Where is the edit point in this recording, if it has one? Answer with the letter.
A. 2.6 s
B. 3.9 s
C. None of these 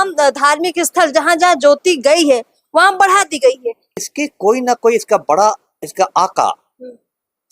B